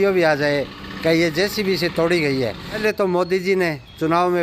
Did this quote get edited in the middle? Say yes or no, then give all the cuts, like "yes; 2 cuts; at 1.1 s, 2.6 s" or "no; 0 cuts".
yes; 1 cut; at 2.8 s